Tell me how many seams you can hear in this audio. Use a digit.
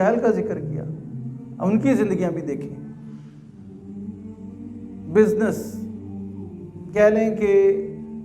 2